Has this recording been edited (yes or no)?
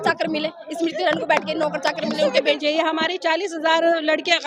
yes